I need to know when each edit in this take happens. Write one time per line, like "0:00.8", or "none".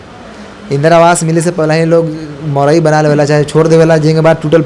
none